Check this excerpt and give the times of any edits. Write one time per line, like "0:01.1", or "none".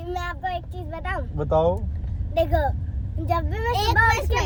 none